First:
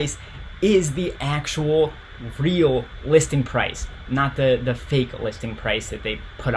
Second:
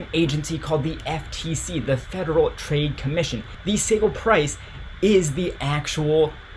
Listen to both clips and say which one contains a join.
second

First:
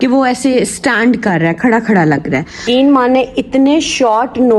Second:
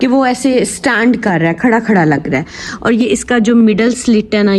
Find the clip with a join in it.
first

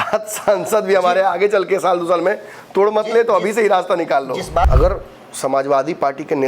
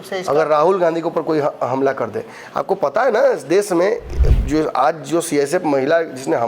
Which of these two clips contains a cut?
first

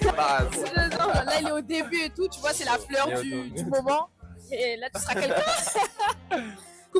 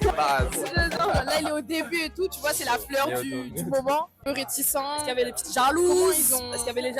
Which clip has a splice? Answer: second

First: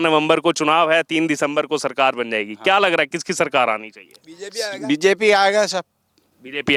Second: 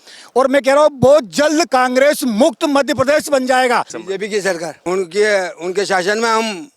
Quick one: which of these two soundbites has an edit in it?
second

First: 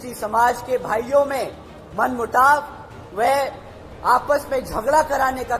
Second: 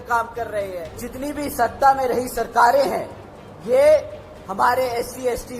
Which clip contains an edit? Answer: second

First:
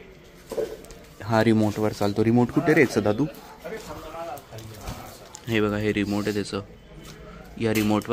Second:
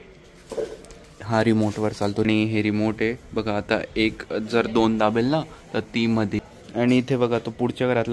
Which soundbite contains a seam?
second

